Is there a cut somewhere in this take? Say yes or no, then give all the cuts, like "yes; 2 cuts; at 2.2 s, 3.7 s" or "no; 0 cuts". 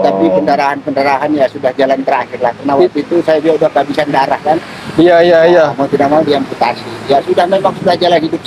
no; 0 cuts